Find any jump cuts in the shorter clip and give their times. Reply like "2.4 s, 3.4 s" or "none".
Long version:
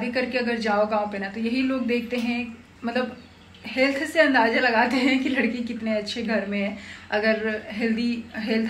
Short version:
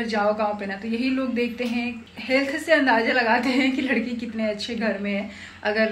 2.1 s